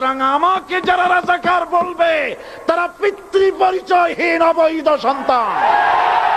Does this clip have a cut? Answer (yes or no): no